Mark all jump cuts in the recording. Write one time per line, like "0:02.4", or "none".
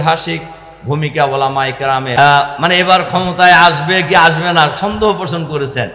0:02.1